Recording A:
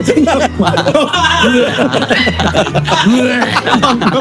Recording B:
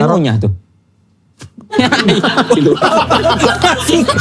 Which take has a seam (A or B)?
B